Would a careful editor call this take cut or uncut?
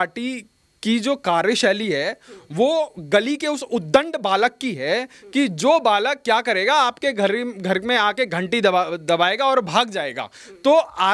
uncut